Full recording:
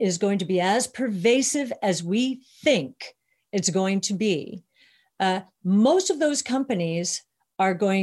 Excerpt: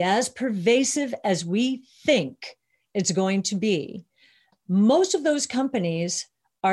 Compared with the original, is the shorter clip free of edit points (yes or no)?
no